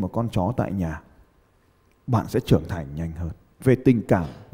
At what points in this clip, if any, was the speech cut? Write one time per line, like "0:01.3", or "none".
none

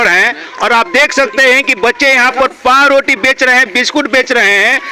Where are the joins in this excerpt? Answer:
none

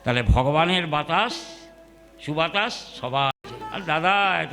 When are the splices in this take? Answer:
0:03.3

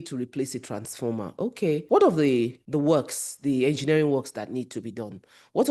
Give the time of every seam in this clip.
0:01.8
0:02.6

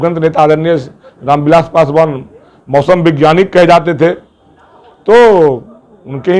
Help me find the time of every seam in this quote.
none

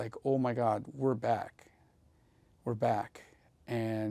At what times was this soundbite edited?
none

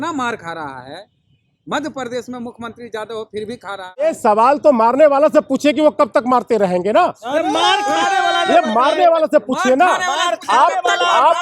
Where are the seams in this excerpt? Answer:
0:04.0

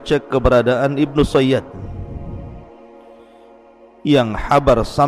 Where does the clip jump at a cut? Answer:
none

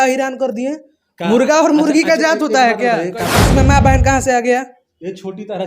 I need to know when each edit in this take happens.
0:03.4

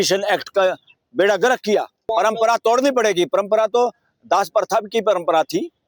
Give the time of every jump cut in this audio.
0:02.0

